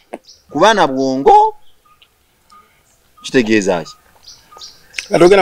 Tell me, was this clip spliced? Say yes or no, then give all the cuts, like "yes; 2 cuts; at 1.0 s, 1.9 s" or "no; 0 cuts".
no; 0 cuts